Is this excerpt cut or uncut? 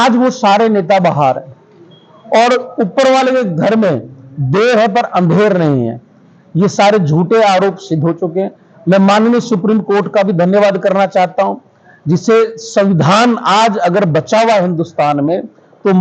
uncut